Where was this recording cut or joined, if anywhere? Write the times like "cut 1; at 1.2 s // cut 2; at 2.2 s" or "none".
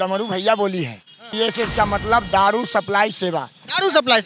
cut 1; at 1.3 s

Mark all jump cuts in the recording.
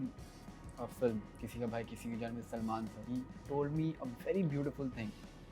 cut 1; at 3.1 s

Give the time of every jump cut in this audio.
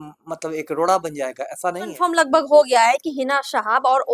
cut 1; at 2.0 s

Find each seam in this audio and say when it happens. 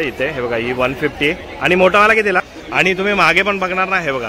cut 1; at 2.5 s

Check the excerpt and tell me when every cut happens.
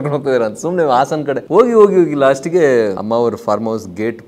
cut 1; at 1.4 s // cut 2; at 3.0 s

